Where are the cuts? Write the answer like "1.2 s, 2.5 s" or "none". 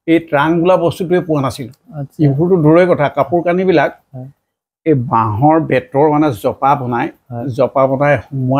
none